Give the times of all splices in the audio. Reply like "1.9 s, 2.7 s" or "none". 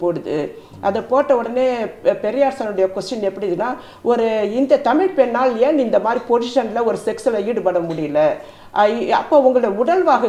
none